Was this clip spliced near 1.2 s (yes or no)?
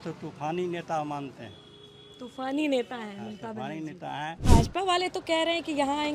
no